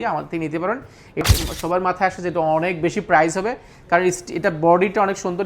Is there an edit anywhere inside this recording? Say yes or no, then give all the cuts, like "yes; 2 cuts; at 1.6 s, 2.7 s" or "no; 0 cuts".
yes; 1 cut; at 1.2 s